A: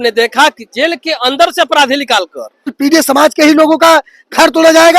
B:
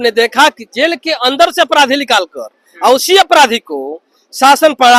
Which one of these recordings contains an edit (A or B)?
A